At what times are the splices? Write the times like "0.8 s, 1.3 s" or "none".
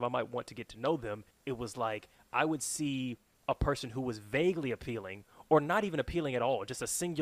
1.3 s, 3.3 s